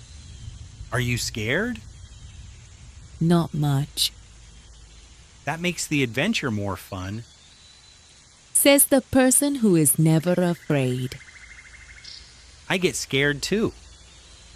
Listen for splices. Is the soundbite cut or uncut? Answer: cut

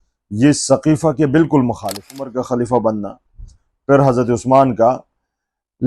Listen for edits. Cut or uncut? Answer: cut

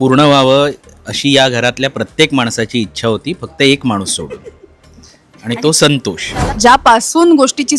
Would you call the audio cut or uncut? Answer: cut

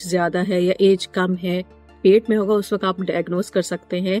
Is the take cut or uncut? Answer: cut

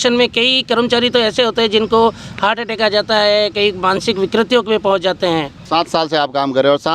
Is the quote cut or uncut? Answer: cut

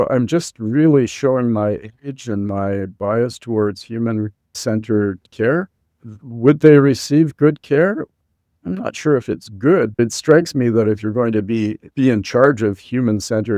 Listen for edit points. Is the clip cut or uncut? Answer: cut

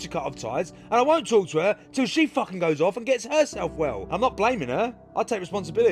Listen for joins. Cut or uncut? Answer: cut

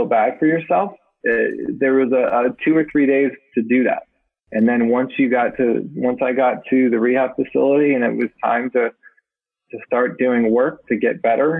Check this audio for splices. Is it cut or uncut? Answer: uncut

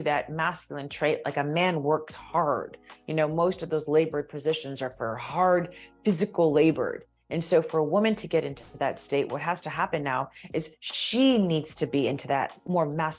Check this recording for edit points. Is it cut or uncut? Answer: uncut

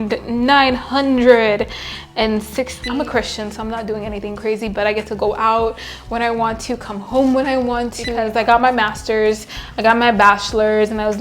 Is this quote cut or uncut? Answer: cut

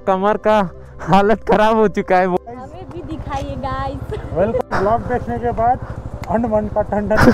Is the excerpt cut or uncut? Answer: cut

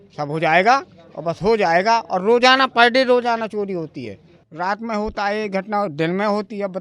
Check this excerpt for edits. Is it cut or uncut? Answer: cut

